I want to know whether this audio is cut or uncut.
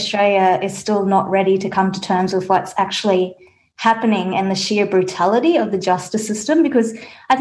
uncut